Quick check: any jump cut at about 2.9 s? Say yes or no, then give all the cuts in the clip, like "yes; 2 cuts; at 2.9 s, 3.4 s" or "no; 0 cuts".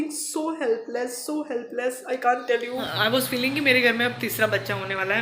yes; 1 cut; at 2.9 s